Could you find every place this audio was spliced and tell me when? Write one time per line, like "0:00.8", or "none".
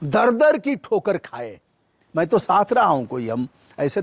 none

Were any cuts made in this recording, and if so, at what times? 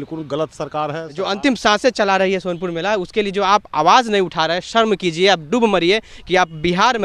0:01.1

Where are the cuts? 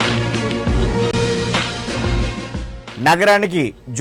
none

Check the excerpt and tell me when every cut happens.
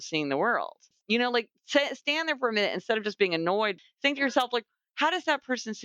0:00.9
0:03.7

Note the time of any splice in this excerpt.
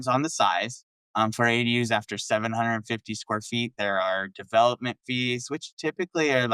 none

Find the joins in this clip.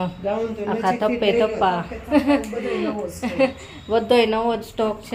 none

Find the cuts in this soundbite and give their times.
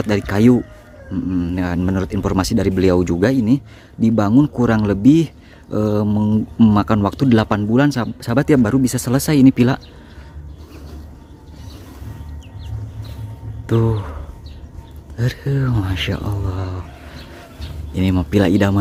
none

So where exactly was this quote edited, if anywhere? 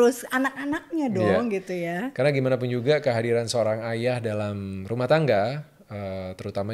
none

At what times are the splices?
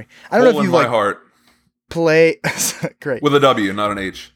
none

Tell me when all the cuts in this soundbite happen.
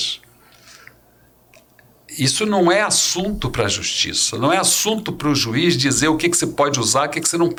none

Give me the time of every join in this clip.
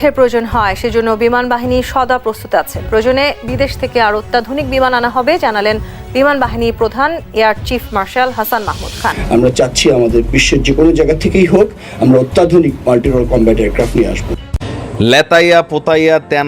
0:09.2
0:14.6

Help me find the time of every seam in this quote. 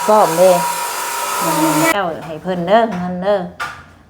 0:01.9

